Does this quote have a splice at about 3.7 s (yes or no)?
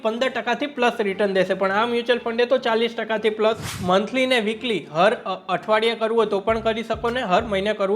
yes